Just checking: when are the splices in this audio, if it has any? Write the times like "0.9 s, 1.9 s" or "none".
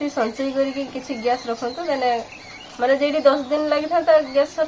none